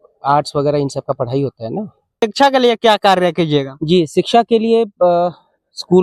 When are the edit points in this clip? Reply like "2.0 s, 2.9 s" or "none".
2.0 s